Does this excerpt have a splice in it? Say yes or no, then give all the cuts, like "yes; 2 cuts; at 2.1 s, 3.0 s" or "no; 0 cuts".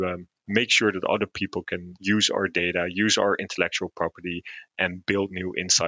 yes; 1 cut; at 1.9 s